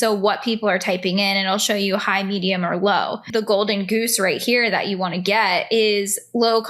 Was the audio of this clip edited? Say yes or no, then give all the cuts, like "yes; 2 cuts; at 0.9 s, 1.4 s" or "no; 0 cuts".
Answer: yes; 1 cut; at 3.3 s